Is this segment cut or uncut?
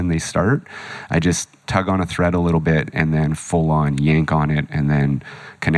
cut